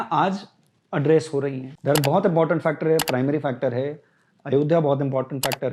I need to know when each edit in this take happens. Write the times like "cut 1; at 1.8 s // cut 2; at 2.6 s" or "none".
cut 1; at 1.7 s